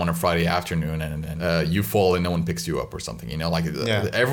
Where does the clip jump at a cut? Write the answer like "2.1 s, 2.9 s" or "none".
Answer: 1.2 s